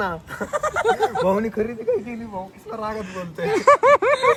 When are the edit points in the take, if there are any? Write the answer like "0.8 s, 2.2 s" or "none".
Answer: none